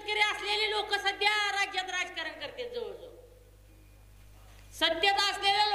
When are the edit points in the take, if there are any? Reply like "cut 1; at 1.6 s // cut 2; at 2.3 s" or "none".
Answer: none